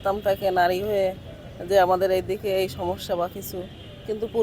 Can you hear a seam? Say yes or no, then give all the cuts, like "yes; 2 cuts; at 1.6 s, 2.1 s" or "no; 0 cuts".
no; 0 cuts